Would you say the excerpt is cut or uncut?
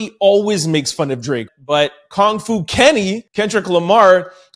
cut